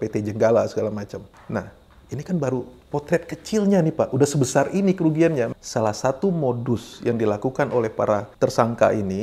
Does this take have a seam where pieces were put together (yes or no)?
yes